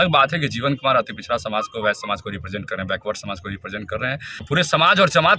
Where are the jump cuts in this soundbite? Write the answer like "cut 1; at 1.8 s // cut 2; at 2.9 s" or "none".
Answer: cut 1; at 4.5 s